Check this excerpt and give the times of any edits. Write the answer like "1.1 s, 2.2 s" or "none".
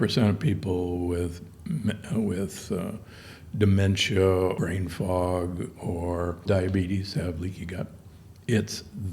4.6 s, 6.4 s